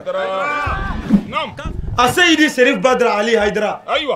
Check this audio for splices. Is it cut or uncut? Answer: cut